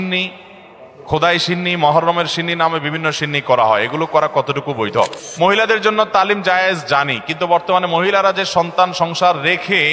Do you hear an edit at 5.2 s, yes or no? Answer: yes